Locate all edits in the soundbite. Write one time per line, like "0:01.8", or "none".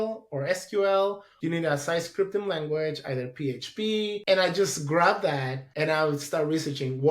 0:01.3
0:04.2